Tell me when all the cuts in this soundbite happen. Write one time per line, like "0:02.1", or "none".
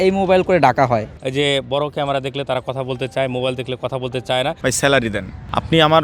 0:01.1
0:04.6